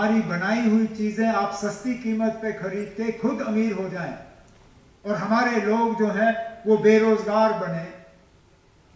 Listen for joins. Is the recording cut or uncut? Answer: uncut